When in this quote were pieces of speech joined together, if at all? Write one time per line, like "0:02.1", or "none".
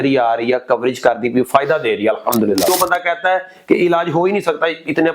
0:02.7